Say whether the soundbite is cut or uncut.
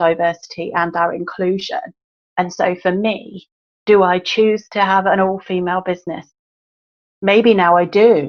uncut